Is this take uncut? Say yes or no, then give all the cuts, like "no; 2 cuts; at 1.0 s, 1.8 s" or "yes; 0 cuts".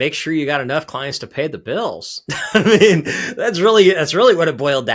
yes; 0 cuts